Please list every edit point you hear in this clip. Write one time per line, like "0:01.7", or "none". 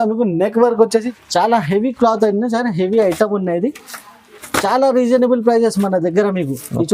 0:01.1